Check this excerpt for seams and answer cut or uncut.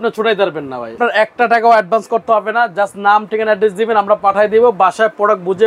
cut